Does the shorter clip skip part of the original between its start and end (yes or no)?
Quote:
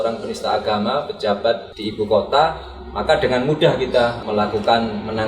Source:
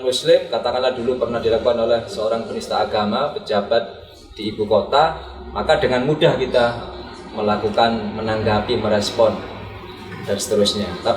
yes